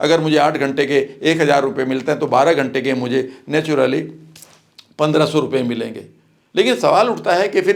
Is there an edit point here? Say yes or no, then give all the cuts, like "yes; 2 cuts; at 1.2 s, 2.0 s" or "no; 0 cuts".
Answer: no; 0 cuts